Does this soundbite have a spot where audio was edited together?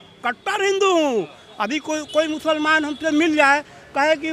no; 0 cuts

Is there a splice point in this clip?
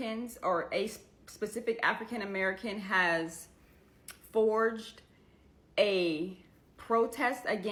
no; 0 cuts

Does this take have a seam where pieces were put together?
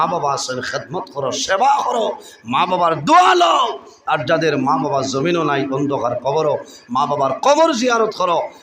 no; 0 cuts

